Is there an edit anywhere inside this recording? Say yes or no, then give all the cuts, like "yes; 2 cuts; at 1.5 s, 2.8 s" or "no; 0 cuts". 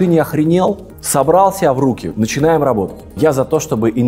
yes; 2 cuts; at 0.9 s, 3.0 s